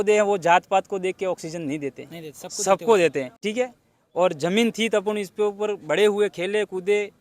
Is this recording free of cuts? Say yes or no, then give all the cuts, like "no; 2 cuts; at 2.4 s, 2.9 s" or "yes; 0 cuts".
no; 1 cut; at 3.4 s